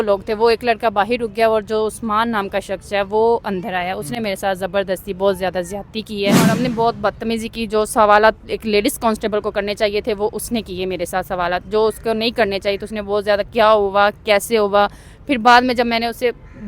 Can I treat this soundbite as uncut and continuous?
no; 1 cut; at 6.3 s

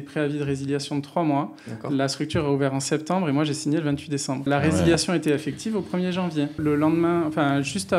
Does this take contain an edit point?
yes; 2 cuts; at 4.5 s, 6.6 s

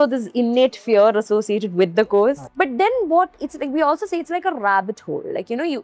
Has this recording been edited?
yes; 1 cut; at 2.5 s

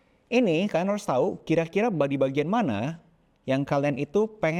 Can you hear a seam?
no; 0 cuts

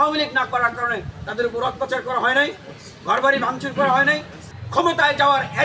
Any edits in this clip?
yes; 1 cut; at 4.6 s

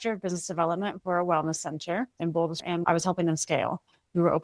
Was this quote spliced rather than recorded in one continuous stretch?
no; 0 cuts

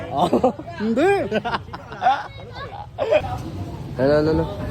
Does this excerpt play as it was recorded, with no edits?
yes; 0 cuts

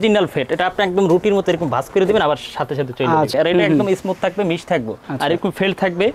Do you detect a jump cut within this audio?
yes; 1 cut; at 3.3 s

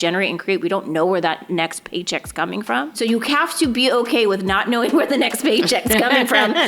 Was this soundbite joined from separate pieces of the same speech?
yes; 1 cut; at 2.9 s

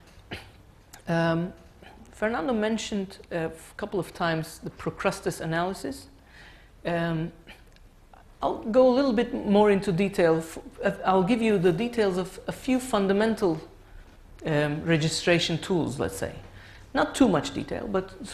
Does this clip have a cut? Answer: yes; 1 cut; at 7.3 s

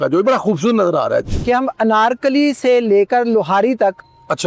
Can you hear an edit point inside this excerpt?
yes; 1 cut; at 1.3 s

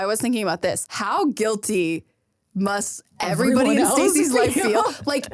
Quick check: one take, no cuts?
no; 1 cut; at 0.9 s

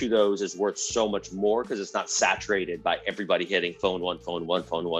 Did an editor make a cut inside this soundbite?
no; 0 cuts

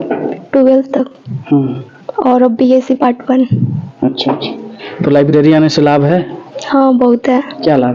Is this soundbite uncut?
yes; 0 cuts

